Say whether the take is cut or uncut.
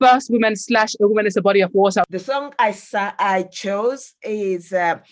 cut